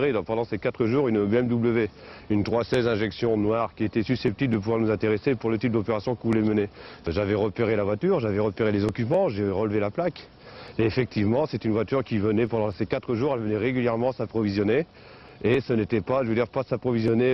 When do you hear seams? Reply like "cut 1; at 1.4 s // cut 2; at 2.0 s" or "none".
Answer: cut 1; at 4.6 s